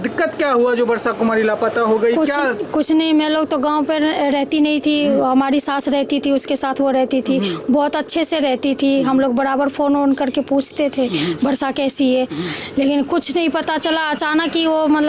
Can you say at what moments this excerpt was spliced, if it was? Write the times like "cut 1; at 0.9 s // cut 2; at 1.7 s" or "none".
none